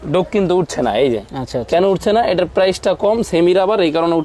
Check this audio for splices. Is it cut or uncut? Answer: uncut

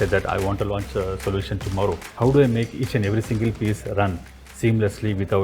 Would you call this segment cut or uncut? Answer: cut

